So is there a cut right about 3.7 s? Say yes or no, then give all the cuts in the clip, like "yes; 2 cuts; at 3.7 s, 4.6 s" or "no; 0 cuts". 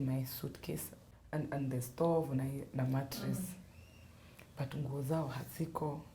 no; 1 cut; at 1.0 s